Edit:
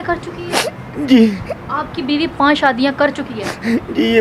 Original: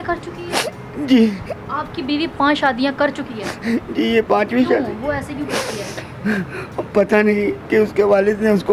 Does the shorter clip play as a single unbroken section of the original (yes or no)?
yes